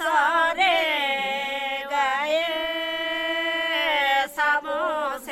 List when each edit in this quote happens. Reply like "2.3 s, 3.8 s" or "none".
none